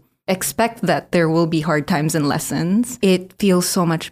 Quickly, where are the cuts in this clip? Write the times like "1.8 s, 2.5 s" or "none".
3.0 s